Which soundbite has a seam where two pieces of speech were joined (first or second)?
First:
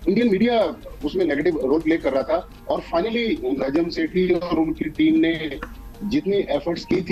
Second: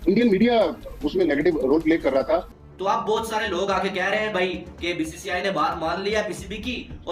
second